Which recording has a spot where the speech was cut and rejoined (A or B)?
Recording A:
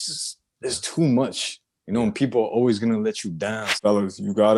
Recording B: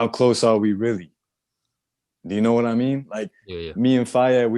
A